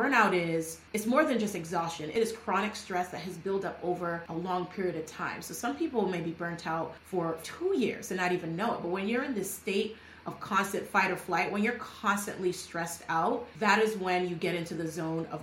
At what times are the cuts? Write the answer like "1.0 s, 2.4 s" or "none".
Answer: 2.1 s, 4.2 s, 7.2 s, 13.5 s